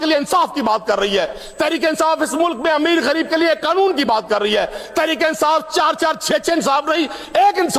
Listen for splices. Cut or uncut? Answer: uncut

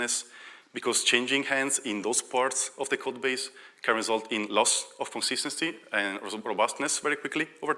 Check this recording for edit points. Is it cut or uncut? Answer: uncut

